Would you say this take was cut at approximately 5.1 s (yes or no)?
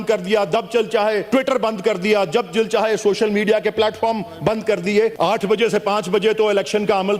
yes